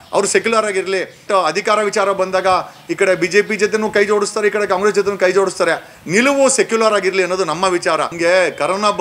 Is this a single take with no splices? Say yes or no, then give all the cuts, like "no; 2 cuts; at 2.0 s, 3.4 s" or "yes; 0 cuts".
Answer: no; 2 cuts; at 1.2 s, 8.1 s